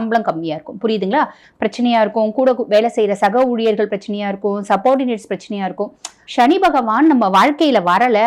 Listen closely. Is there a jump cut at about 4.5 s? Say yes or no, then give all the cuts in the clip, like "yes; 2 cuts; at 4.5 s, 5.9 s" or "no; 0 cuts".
no; 2 cuts; at 1.4 s, 6.2 s